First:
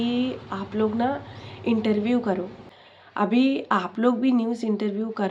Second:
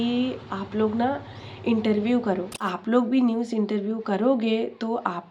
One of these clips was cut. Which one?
second; 1 cut; at 2.7 s

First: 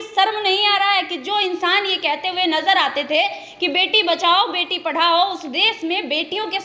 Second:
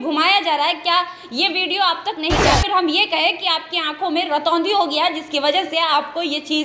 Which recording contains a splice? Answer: second; 1 cut; at 2.4 s

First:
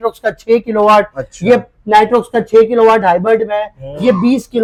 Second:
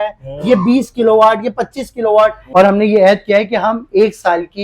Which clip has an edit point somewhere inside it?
second; 1 cut; at 2.4 s

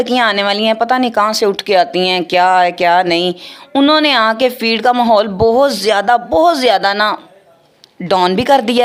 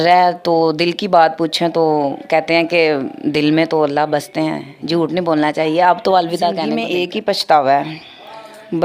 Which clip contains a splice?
second; 1 cut; at 6.8 s

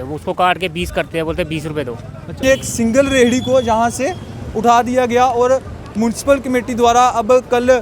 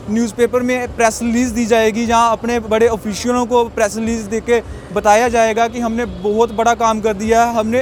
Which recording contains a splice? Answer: first; 1 cut; at 2.4 s

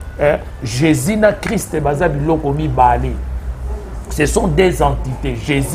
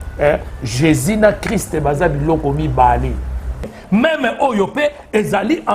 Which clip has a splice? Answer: second; 1 cut; at 3.7 s

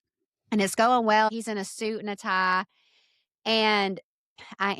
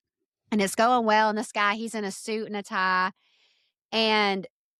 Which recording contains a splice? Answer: first; 1 cut; at 1.3 s

